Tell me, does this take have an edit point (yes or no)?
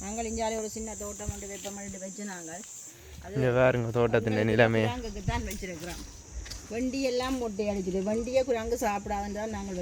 no